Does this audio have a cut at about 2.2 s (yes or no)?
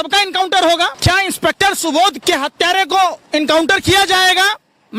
yes